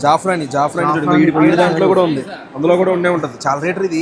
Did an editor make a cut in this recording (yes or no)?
no